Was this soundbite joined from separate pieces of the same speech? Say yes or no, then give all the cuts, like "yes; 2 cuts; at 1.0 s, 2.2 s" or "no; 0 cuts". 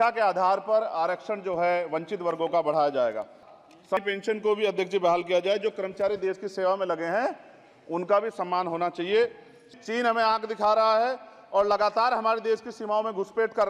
yes; 2 cuts; at 3.9 s, 9.7 s